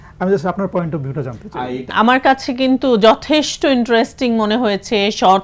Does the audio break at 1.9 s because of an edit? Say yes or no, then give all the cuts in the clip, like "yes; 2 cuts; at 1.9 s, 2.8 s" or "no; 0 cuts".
yes; 1 cut; at 1.9 s